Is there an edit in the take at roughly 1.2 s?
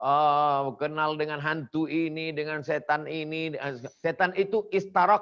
no; 1 cut; at 3.9 s

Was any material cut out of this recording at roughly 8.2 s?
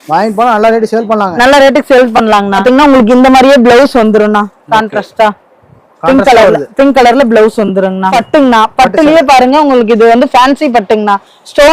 yes; 2 cuts; at 2.6 s, 8.2 s

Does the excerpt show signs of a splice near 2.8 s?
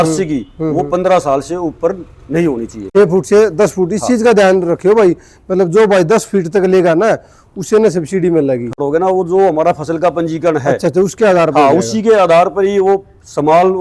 yes; 2 cuts; at 2.8 s, 8.8 s

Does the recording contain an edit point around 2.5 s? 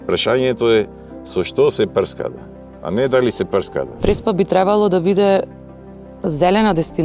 no; 1 cut; at 3.9 s

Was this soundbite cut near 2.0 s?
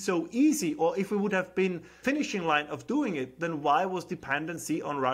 yes; 1 cut; at 2.0 s

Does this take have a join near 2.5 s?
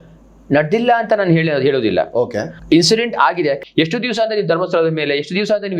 yes; 2 cuts; at 2.5 s, 3.6 s

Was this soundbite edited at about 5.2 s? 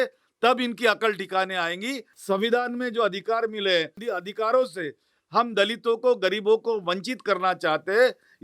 no; 2 cuts; at 2.1 s, 4.0 s

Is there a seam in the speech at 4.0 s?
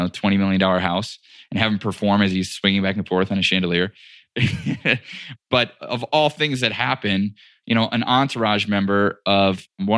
no; 1 cut; at 5.3 s

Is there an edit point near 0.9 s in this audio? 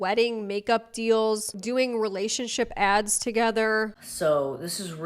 no; 1 cut; at 4.0 s

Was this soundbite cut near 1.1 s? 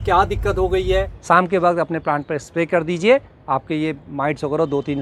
yes; 1 cut; at 1.1 s

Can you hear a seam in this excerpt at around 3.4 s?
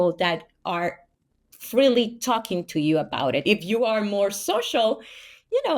yes; 1 cut; at 3.4 s

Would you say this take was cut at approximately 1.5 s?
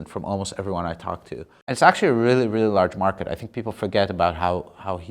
yes; 1 cut; at 1.5 s

